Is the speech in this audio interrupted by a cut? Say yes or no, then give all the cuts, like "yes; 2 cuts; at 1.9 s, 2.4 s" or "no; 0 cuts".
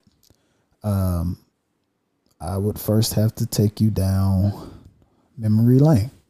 no; 0 cuts